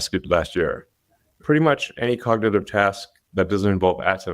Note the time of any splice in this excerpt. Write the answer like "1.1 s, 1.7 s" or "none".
1.3 s